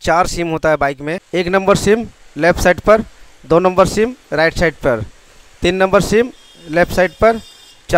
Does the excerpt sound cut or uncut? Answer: cut